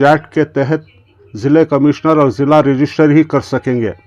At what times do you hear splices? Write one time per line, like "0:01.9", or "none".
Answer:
none